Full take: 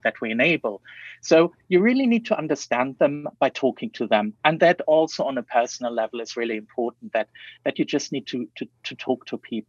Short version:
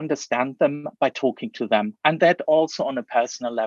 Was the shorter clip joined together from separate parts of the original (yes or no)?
no